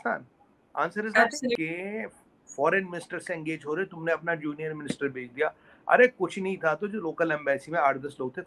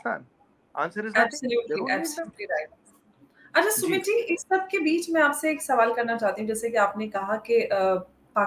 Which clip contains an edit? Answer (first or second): first